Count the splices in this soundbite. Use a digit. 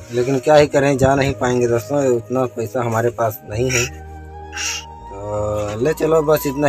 0